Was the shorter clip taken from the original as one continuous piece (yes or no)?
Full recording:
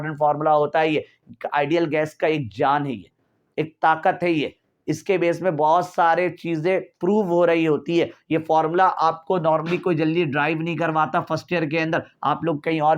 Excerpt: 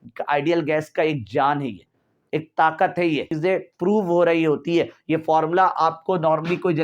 no